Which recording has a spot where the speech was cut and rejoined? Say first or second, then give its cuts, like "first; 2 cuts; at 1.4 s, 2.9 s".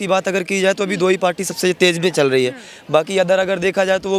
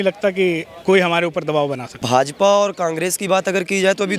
second; 1 cut; at 1.9 s